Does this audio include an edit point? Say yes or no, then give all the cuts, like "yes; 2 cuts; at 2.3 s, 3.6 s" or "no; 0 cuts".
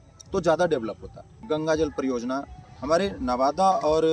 yes; 1 cut; at 1.3 s